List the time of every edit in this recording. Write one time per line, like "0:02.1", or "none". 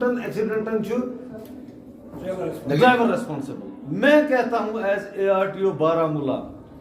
0:02.1